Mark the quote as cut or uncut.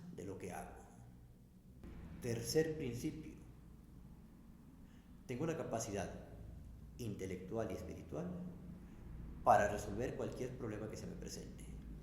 cut